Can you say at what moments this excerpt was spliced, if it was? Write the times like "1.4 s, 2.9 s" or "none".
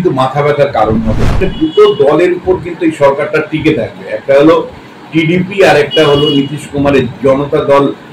1.4 s